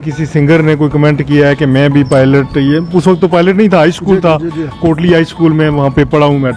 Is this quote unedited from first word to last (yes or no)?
yes